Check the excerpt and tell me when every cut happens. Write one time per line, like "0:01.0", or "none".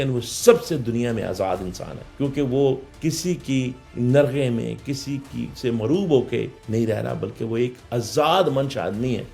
none